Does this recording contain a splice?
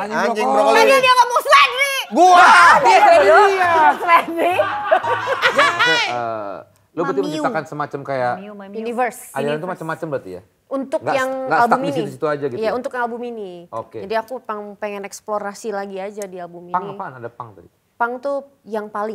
yes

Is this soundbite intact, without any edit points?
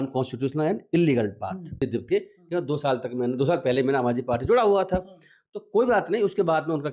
no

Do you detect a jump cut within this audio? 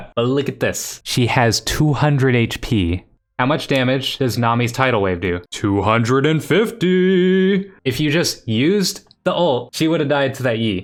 no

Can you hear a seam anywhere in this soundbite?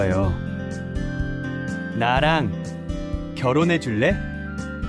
no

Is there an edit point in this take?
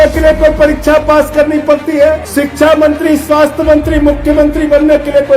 yes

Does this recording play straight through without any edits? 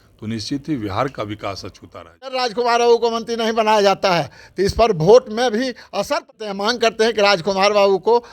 no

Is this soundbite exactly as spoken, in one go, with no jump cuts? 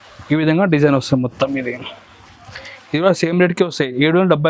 yes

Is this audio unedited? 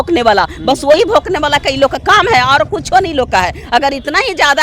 yes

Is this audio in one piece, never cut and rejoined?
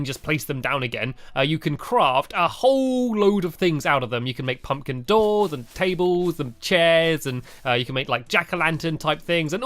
no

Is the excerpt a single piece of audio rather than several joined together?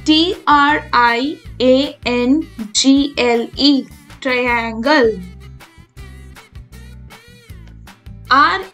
yes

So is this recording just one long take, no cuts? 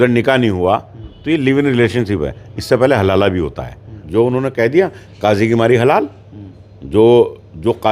no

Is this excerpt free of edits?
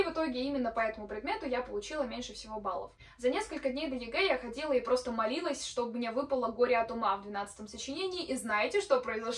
yes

